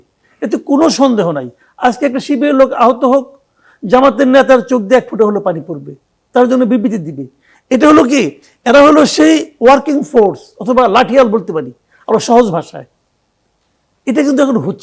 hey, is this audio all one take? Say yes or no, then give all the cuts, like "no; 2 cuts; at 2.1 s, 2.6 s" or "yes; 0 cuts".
yes; 0 cuts